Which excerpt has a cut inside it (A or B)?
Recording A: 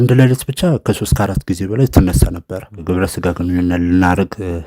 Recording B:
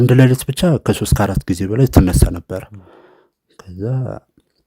A